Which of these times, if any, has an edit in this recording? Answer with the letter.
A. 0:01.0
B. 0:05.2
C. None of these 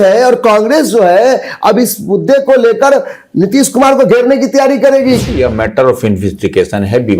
B